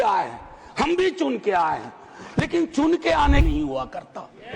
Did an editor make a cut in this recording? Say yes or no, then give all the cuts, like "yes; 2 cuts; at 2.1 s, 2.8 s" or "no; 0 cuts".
yes; 1 cut; at 3.4 s